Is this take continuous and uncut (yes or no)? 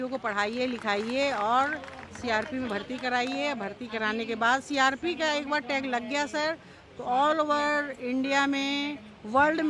yes